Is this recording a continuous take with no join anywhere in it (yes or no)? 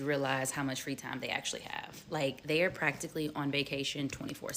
no